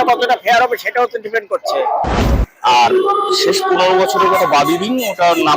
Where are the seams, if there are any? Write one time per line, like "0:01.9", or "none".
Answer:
0:02.4